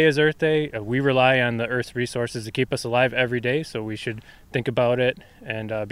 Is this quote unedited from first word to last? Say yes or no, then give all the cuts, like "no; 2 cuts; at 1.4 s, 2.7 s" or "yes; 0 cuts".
yes; 0 cuts